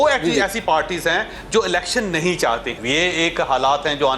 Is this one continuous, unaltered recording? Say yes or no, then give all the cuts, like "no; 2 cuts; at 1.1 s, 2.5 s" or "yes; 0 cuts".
no; 1 cut; at 2.7 s